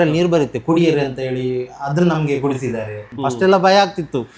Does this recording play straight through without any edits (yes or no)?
no